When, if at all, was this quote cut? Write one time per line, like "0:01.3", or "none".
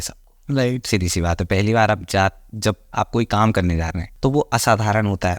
0:04.0